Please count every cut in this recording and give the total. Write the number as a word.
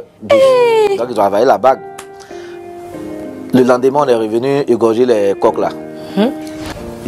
two